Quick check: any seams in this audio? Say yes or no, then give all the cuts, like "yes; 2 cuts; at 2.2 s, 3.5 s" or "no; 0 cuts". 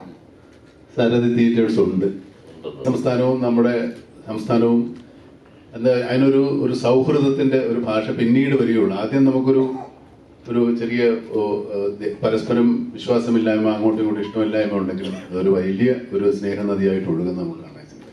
yes; 1 cut; at 2.8 s